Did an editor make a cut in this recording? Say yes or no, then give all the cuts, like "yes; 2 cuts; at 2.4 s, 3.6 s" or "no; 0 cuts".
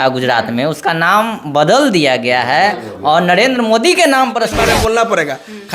yes; 1 cut; at 4.6 s